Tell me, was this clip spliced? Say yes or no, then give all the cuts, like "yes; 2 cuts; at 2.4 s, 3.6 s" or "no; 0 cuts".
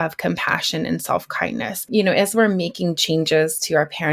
yes; 1 cut; at 1.8 s